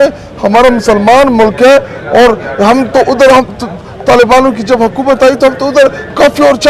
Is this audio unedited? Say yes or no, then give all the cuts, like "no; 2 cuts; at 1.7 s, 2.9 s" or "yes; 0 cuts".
yes; 0 cuts